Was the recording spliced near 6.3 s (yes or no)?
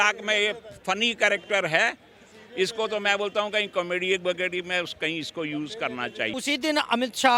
yes